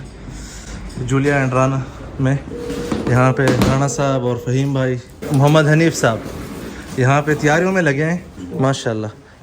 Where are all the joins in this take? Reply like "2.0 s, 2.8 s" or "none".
none